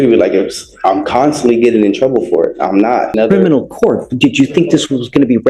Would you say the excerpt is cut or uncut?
cut